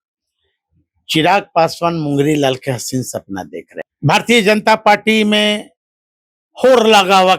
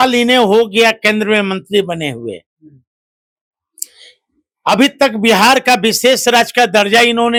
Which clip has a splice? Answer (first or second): first